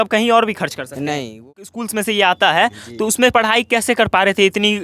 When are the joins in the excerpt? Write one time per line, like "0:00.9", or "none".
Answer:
0:01.5